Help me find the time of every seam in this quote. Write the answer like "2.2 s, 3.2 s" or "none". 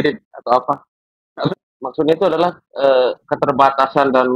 1.5 s

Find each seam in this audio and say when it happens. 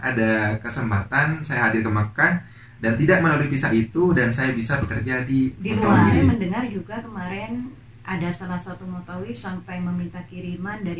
6.1 s

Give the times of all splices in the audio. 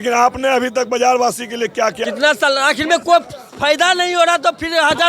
2.0 s

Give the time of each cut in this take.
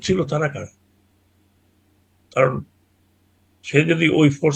none

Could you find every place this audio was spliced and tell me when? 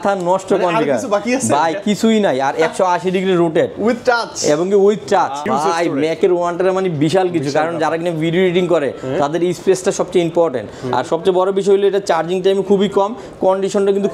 5.5 s

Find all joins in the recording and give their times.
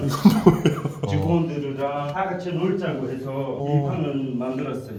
none

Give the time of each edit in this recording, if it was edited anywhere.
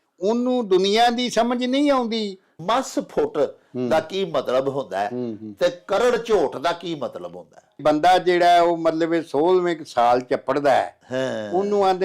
2.6 s, 7.8 s

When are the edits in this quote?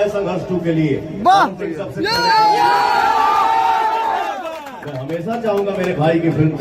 none

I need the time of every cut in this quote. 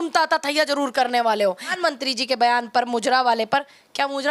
1.7 s

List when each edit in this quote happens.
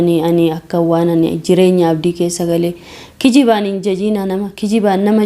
none

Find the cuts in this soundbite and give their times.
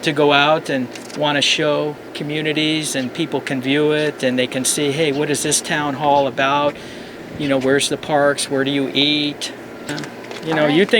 9.9 s

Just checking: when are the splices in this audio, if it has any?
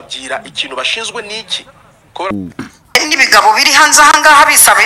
2.3 s

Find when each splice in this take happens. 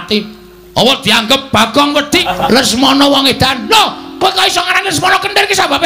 2.2 s

